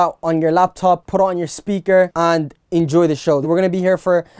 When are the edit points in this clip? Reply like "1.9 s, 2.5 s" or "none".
1.0 s, 2.1 s, 3.5 s